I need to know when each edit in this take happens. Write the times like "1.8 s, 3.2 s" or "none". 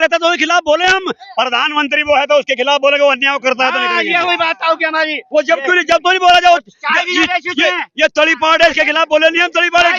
none